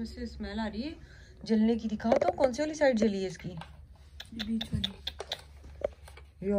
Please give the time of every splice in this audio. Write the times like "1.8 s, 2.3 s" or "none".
none